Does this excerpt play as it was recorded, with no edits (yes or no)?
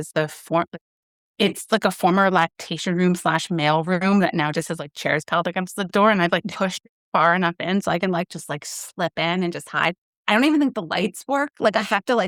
yes